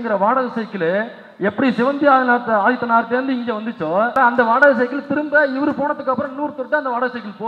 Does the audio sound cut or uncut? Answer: cut